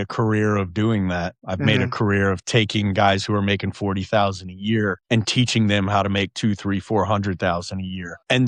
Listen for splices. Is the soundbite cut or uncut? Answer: uncut